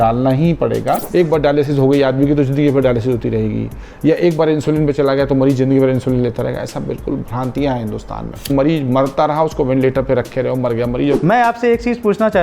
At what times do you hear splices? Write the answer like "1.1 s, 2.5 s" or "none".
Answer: 1.1 s, 8.5 s, 11.2 s